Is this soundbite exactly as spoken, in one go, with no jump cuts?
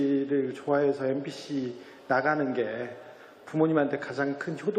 no; 1 cut; at 2.6 s

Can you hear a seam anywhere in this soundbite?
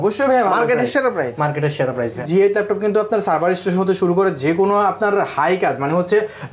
yes; 1 cut; at 2.2 s

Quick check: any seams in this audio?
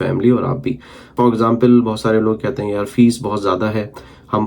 yes; 1 cut; at 1.1 s

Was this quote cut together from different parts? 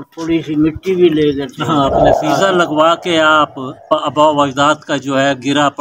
yes; 2 cuts; at 2.2 s, 3.9 s

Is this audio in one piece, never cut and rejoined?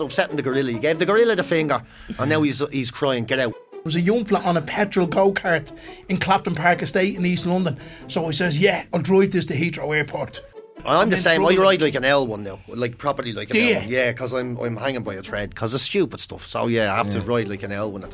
no; 3 cuts; at 3.8 s, 8.9 s, 10.5 s

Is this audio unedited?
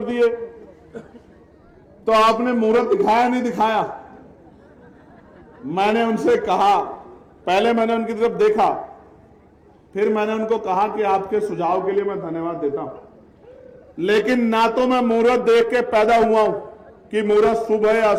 yes; 0 cuts

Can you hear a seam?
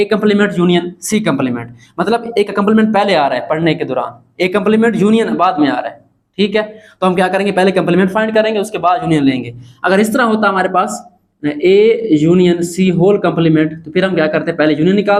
no; 0 cuts

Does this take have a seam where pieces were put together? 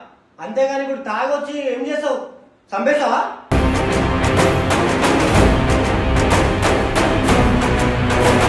no; 0 cuts

